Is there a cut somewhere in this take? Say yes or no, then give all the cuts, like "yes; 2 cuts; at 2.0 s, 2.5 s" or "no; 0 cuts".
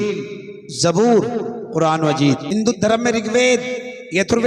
yes; 1 cut; at 2.4 s